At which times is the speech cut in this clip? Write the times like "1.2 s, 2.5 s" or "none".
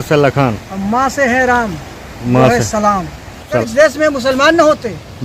3.6 s